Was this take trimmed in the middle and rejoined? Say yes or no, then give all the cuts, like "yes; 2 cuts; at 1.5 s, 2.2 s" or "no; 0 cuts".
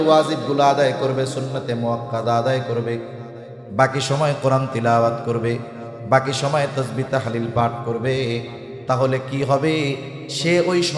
no; 0 cuts